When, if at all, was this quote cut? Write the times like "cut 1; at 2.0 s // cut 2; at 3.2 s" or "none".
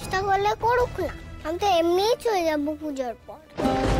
none